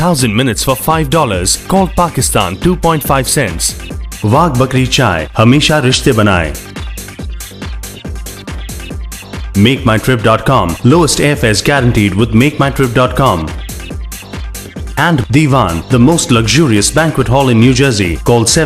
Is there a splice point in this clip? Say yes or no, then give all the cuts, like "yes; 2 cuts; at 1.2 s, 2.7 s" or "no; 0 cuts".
no; 0 cuts